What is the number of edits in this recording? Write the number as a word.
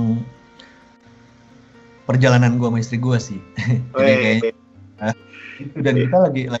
one